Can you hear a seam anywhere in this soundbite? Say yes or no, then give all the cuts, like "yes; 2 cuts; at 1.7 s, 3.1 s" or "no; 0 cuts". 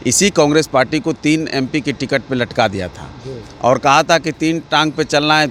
no; 0 cuts